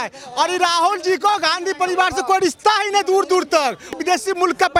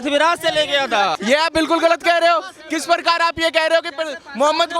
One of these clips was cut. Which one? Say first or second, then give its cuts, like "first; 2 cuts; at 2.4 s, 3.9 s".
second; 1 cut; at 1.2 s